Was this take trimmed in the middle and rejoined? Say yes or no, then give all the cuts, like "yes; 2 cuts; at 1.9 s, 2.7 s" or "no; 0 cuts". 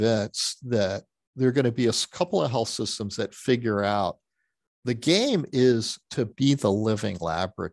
yes; 1 cut; at 6.3 s